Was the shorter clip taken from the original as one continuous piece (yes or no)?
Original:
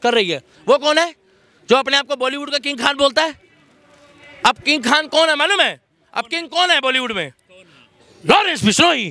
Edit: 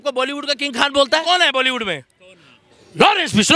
no